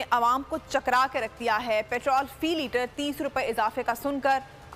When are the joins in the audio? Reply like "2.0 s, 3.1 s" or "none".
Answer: none